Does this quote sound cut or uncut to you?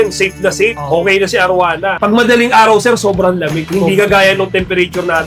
uncut